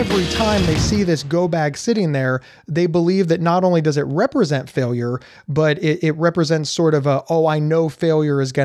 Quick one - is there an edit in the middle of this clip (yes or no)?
no